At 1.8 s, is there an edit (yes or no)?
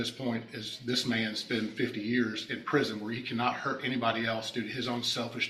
no